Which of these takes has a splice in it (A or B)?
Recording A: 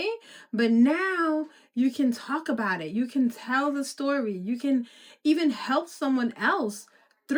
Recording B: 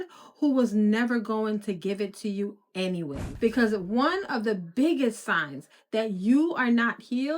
B